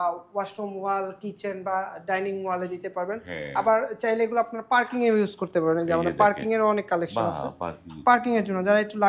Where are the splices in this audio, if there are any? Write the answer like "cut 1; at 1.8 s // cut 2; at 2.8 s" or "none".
none